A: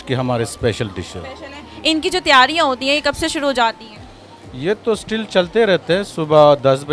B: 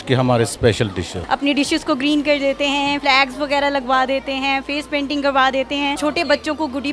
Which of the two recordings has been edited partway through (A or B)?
B